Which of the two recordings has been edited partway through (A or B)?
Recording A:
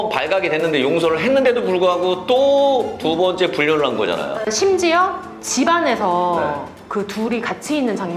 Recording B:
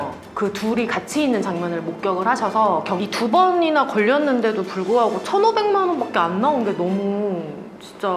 B